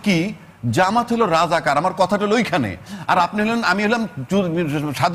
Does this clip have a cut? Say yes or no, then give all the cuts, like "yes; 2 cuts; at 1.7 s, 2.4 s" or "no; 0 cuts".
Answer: no; 0 cuts